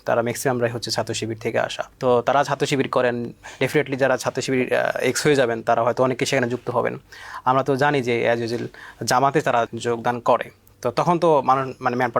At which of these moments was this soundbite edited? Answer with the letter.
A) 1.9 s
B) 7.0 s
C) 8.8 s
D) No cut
A